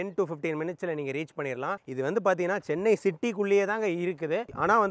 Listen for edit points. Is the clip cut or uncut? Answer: uncut